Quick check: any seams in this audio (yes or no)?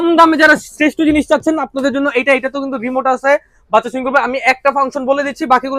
no